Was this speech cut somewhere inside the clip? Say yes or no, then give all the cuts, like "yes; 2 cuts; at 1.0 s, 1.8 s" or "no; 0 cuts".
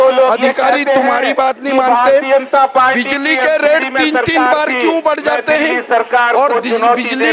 no; 0 cuts